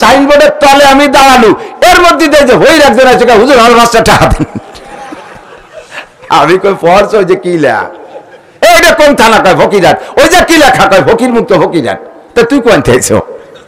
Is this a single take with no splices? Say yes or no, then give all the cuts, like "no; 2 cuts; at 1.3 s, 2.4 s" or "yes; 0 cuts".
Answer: yes; 0 cuts